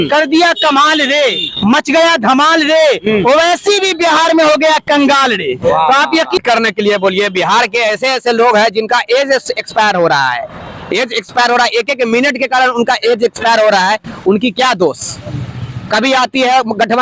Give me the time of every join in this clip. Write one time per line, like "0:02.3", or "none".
0:06.4